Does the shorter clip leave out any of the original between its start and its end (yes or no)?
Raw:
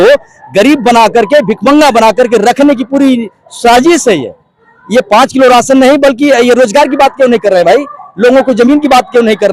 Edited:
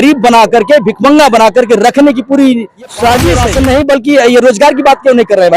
yes